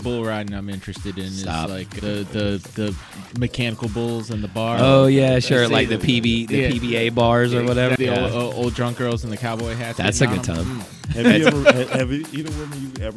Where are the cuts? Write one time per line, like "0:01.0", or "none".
0:08.0
0:11.0